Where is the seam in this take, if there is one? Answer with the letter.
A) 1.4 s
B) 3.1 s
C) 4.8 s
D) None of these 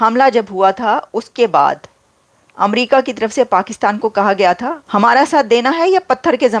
C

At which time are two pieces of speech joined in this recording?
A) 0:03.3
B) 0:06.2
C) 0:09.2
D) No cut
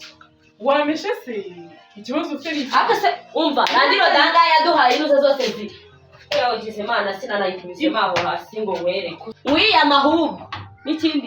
C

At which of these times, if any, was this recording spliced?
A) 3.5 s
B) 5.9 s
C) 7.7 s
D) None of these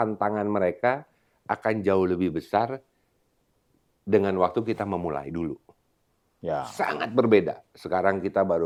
D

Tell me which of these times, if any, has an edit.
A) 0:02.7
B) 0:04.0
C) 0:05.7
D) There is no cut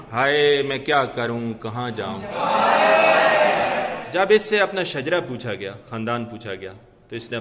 B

